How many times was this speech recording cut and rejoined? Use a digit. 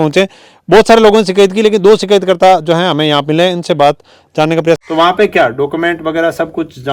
1